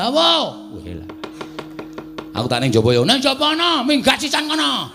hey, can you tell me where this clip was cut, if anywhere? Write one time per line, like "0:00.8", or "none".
none